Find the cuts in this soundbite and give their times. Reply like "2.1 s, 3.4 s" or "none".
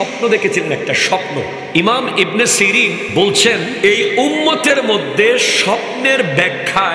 1.6 s, 3.1 s, 3.7 s